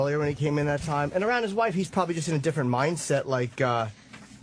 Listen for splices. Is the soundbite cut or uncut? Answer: cut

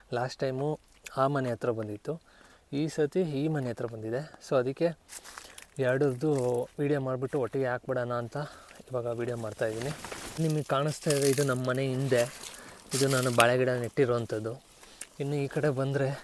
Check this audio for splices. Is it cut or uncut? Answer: uncut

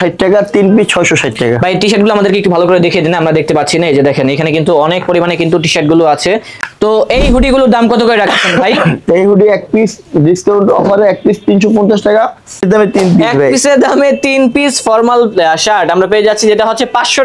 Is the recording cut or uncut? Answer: cut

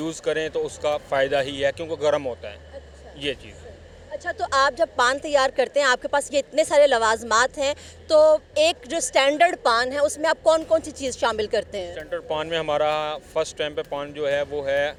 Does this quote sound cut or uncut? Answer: uncut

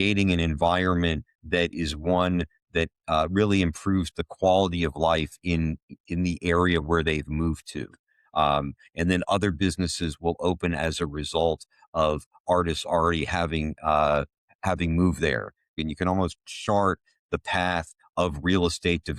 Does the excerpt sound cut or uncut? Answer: cut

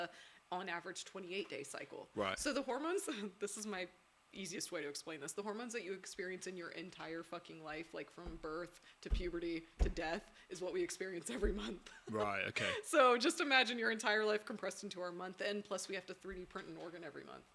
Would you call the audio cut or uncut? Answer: uncut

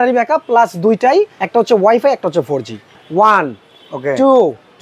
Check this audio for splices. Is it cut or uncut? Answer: cut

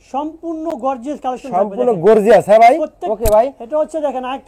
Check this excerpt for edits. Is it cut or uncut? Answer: cut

